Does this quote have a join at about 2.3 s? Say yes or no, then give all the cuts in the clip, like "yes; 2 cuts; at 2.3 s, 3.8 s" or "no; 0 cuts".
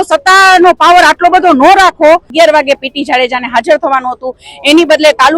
yes; 1 cut; at 2.3 s